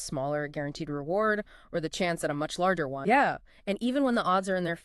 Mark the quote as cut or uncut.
cut